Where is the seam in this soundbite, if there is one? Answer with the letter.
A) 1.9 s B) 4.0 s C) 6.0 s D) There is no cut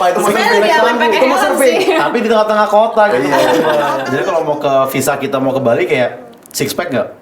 B